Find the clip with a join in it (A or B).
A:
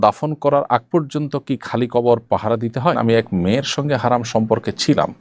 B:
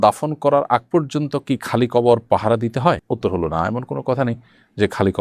A